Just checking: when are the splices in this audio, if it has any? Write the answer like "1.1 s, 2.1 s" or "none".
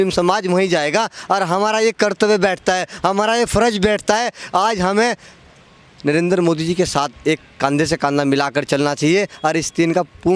none